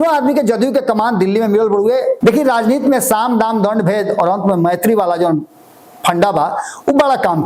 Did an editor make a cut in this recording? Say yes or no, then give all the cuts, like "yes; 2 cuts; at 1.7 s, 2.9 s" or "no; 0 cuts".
yes; 1 cut; at 2.2 s